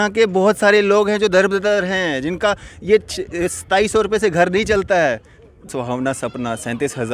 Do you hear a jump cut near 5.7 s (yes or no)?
yes